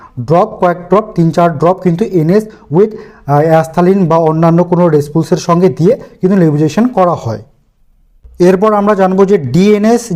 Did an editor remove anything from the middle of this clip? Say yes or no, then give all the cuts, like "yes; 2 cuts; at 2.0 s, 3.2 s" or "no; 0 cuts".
no; 0 cuts